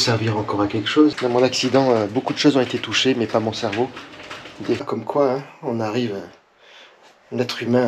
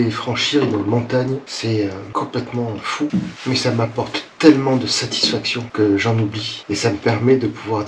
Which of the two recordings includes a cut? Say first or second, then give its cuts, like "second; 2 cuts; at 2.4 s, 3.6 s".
first; 2 cuts; at 1.2 s, 4.8 s